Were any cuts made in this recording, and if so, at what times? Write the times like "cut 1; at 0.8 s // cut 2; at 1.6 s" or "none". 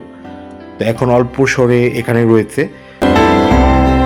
cut 1; at 3.0 s